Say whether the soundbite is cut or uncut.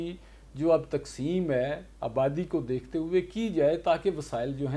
uncut